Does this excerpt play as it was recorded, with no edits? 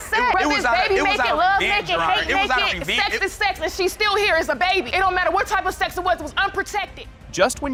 yes; 0 cuts

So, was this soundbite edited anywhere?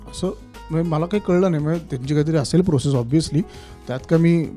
no; 0 cuts

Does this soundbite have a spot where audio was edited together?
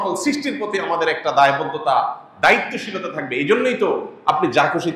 no; 0 cuts

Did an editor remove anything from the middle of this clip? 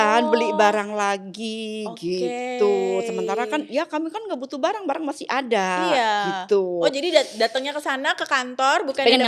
no; 0 cuts

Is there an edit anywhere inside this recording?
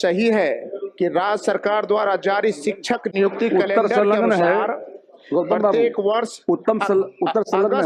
no; 0 cuts

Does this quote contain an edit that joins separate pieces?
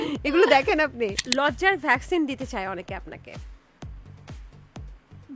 yes; 1 cut; at 1.2 s

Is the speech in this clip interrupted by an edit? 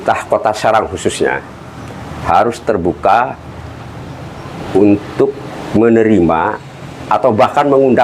no; 0 cuts

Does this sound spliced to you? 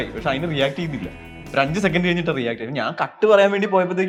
no; 0 cuts

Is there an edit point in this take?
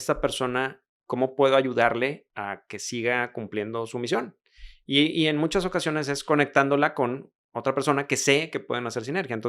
yes; 2 cuts; at 0.9 s, 2.3 s

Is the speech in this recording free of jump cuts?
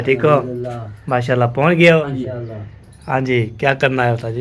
no; 1 cut; at 2.0 s

